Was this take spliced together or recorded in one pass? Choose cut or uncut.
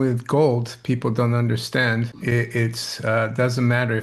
cut